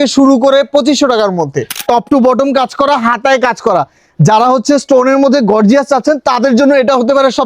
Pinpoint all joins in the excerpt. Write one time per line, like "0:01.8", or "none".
0:01.8